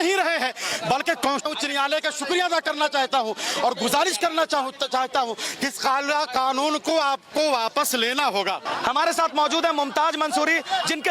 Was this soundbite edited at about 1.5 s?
yes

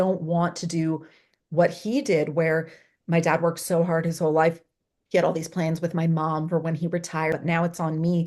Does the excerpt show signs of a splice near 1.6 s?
no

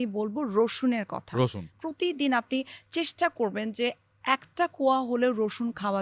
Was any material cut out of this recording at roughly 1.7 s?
yes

